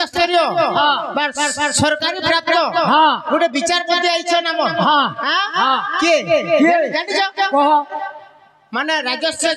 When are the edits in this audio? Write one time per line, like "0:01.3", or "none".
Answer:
none

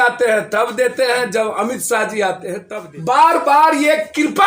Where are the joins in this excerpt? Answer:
0:02.6

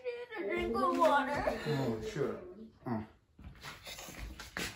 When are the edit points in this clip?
none

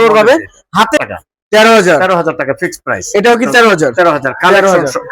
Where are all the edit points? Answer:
0:01.0

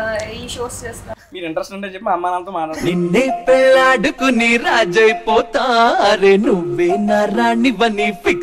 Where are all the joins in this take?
0:01.1
0:02.8

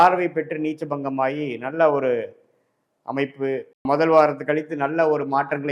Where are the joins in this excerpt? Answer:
0:03.7

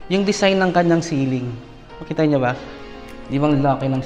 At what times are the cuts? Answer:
0:02.7

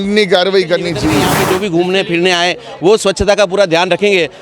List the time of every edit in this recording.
0:01.3

